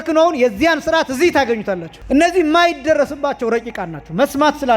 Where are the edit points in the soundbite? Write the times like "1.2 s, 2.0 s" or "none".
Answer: 1.9 s